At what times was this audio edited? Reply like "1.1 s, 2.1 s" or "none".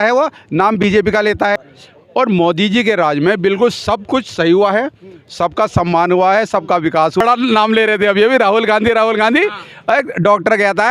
1.6 s, 7.2 s